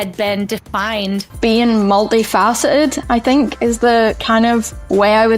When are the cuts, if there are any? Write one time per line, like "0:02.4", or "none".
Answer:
0:01.3